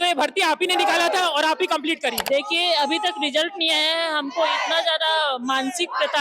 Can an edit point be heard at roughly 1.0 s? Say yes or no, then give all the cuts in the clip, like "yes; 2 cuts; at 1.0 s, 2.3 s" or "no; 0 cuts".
no; 1 cut; at 2.2 s